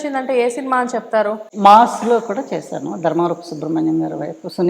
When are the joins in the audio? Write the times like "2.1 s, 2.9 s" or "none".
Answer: 1.4 s